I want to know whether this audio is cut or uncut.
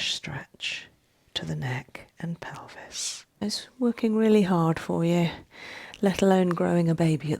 cut